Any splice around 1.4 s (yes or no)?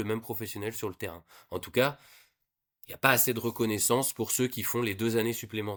no